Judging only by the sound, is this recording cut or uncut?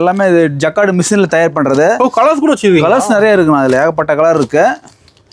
uncut